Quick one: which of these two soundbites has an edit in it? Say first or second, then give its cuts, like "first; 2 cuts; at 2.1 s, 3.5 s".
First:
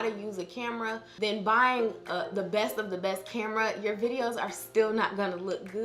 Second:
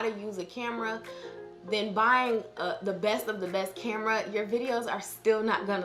first; 1 cut; at 1.1 s